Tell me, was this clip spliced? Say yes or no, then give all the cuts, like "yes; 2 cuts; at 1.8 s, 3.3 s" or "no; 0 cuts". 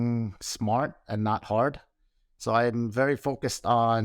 no; 0 cuts